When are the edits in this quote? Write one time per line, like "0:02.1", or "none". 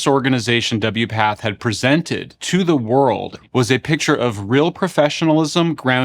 0:03.3